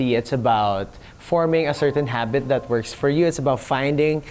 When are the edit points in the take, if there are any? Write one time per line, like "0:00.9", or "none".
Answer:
none